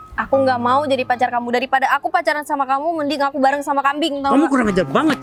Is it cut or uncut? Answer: uncut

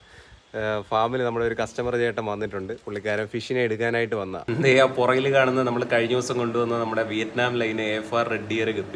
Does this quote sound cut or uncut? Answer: cut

